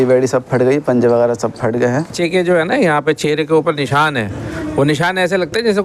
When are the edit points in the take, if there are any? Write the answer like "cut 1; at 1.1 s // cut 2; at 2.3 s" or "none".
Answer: cut 1; at 2.1 s

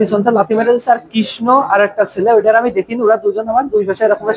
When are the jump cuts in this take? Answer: none

